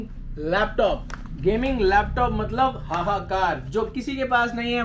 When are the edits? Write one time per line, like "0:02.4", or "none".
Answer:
none